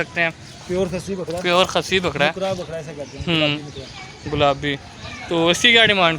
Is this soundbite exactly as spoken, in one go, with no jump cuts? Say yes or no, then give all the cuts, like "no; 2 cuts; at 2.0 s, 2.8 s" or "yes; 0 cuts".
yes; 0 cuts